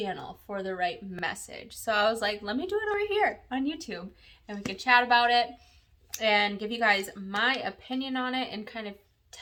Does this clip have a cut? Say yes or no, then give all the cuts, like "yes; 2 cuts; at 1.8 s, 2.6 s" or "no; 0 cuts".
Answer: no; 0 cuts